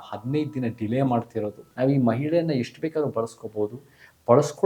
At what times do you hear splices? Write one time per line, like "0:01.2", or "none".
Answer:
0:01.6